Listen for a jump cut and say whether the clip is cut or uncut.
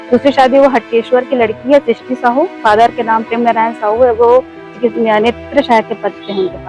cut